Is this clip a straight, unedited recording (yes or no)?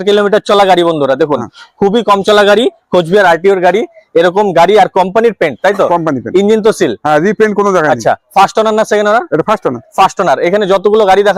yes